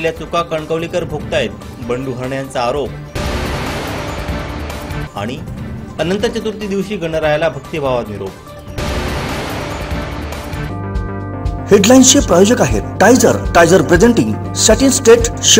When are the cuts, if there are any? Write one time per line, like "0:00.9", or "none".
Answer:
none